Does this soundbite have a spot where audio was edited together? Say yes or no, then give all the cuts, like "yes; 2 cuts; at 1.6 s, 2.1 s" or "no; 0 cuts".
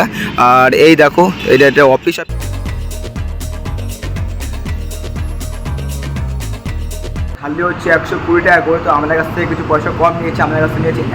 yes; 2 cuts; at 2.1 s, 7.5 s